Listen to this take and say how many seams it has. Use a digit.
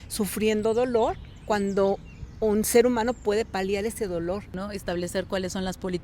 1